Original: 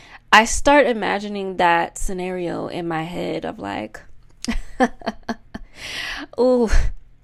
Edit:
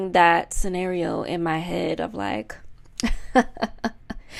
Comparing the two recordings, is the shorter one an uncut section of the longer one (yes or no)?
yes